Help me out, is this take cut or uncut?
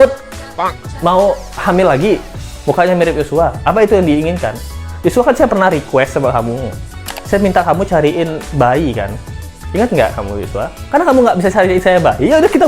uncut